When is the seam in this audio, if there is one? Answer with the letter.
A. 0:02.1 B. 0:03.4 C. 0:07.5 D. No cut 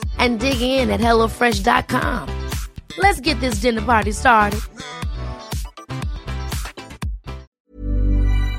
C